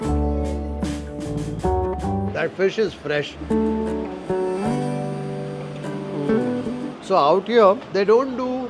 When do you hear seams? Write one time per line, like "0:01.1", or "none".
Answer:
0:03.4

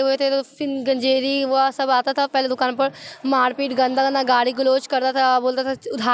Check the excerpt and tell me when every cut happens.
none

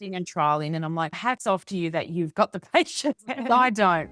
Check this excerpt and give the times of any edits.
0:03.2

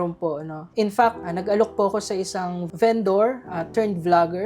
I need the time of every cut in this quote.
0:01.2

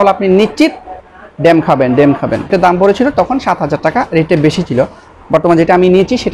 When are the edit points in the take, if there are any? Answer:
0:02.5

